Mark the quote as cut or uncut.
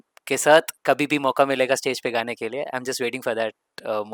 uncut